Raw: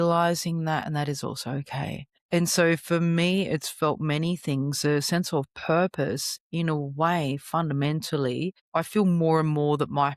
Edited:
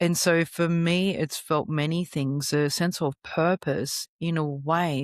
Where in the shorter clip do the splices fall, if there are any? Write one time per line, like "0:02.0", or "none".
none